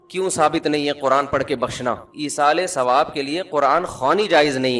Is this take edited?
yes; 1 cut; at 2.1 s

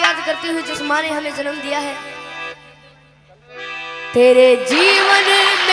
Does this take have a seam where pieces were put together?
no; 0 cuts

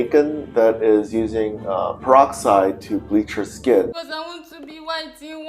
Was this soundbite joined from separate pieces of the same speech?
yes; 1 cut; at 3.9 s

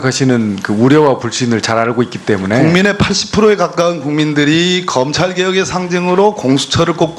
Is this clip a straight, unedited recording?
no; 1 cut; at 2.6 s

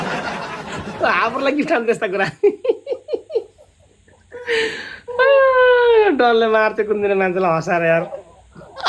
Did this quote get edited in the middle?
no; 0 cuts

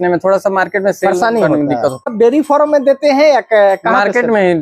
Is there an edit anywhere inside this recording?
yes; 1 cut; at 2.1 s

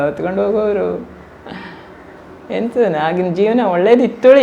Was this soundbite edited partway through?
no; 0 cuts

